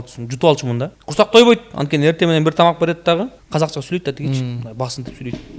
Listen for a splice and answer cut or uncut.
cut